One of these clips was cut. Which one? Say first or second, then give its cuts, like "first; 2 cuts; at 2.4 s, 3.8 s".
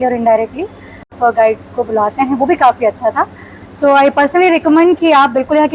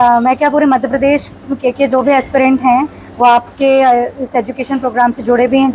first; 1 cut; at 1.1 s